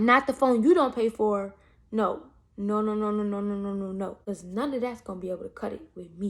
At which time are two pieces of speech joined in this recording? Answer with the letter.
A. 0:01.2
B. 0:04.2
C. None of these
B